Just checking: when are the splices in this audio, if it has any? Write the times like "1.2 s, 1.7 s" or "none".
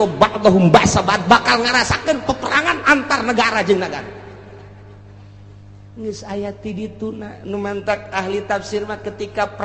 none